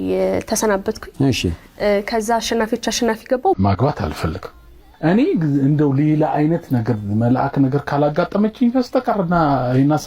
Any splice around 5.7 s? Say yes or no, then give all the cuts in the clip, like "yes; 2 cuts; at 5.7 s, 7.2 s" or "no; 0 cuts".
no; 1 cut; at 3.6 s